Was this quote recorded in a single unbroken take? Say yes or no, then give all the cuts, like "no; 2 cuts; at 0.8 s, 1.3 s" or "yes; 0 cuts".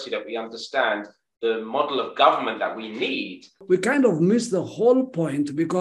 no; 1 cut; at 3.6 s